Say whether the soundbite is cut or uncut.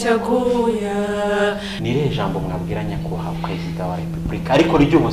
cut